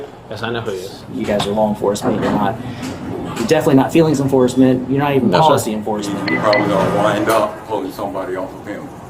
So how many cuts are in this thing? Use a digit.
2